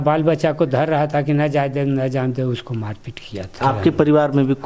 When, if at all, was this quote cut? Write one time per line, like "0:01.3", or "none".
0:03.5